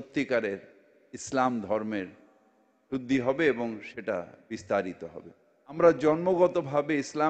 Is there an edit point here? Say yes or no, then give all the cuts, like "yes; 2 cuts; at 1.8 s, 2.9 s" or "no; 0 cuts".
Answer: yes; 1 cut; at 5.8 s